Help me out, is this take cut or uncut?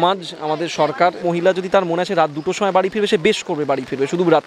cut